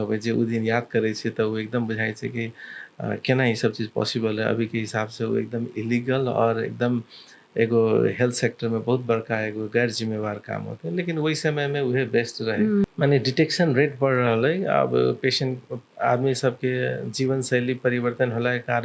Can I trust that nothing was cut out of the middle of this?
no; 1 cut; at 12.8 s

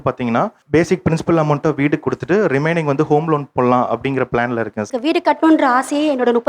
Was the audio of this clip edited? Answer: yes; 1 cut; at 4.9 s

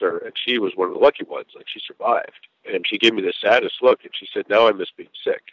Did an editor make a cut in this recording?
yes; 1 cut; at 2.5 s

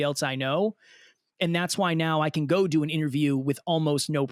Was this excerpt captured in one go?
yes; 0 cuts

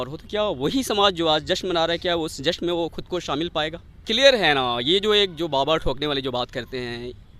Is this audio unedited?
no; 1 cut; at 4.0 s

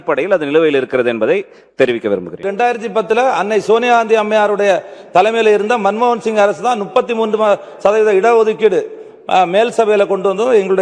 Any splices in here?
yes; 1 cut; at 2.5 s

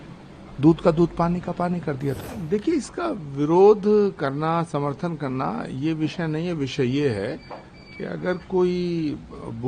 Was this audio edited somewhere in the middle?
yes; 1 cut; at 2.2 s

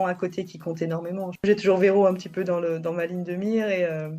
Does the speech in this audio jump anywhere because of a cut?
yes; 1 cut; at 1.4 s

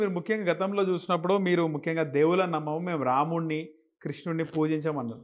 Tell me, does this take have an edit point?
no; 0 cuts

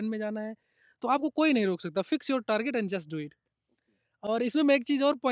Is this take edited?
no; 0 cuts

